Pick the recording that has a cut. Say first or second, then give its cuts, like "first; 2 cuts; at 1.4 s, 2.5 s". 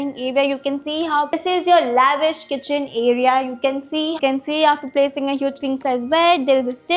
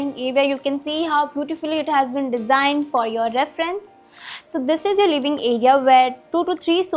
first; 2 cuts; at 1.4 s, 4.2 s